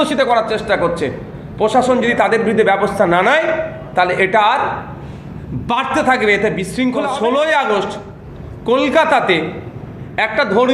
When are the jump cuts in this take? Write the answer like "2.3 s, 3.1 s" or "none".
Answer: 7.0 s